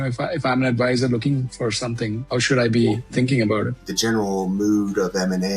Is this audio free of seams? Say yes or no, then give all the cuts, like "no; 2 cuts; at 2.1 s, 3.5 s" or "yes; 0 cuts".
no; 2 cuts; at 2.2 s, 3.9 s